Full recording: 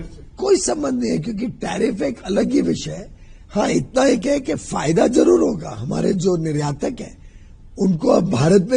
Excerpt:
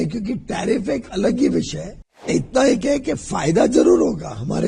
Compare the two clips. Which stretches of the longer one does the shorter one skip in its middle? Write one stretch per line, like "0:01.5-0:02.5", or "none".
0:03.4-0:03.7

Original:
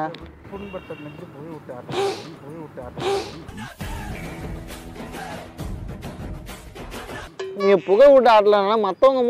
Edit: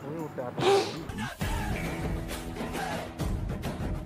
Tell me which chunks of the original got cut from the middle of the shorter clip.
none

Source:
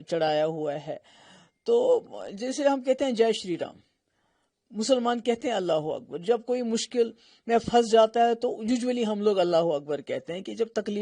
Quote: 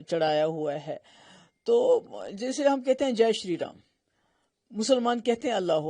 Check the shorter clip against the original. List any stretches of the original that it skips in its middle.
none

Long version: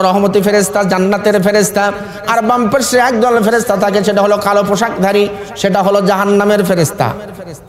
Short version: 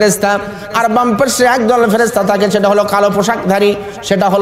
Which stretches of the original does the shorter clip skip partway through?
none

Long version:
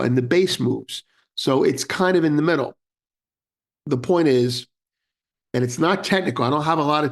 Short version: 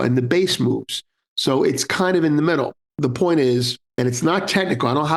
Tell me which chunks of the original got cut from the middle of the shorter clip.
0:02.8-0:03.7
0:04.7-0:05.4

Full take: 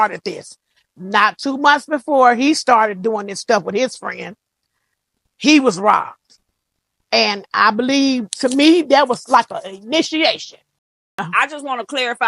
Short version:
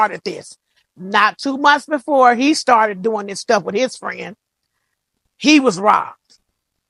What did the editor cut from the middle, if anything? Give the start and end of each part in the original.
none

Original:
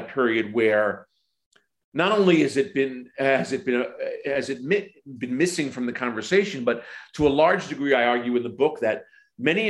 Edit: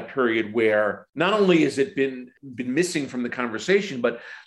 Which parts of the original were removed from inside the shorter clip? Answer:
0:01.0-0:01.8
0:03.1-0:04.9

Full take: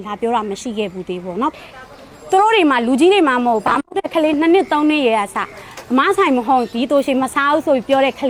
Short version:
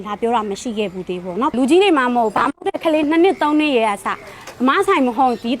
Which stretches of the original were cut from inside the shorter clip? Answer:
0:01.5-0:02.8

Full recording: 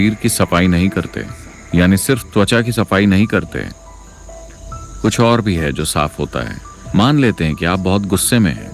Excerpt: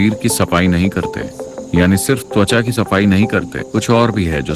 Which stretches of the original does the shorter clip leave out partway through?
0:03.6-0:04.9

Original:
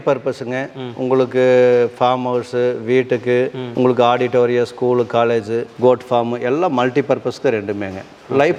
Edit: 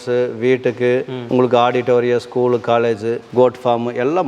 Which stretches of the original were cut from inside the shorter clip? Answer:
none

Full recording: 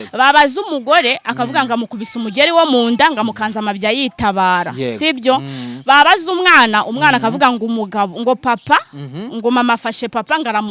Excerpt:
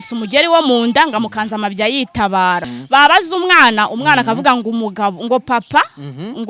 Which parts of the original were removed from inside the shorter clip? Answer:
0:04.7-0:05.6

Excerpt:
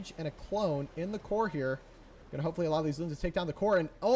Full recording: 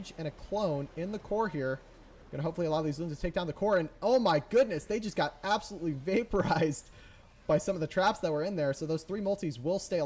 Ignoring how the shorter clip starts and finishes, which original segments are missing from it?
none

